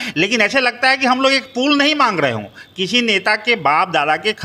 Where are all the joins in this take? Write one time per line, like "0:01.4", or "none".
none